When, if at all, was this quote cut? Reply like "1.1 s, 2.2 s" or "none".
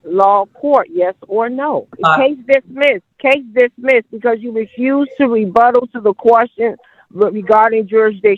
1.9 s, 3.1 s